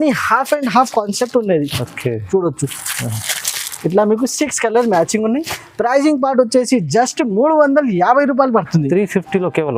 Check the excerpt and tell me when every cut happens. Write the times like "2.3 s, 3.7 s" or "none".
none